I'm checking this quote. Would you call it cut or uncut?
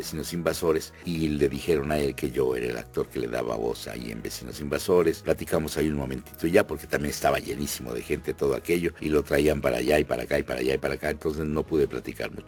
uncut